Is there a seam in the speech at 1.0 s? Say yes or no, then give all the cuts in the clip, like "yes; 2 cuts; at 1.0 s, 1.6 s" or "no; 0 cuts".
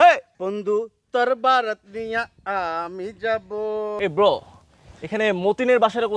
no; 1 cut; at 4.0 s